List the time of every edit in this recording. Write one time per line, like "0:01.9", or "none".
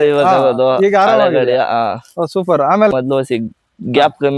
0:02.9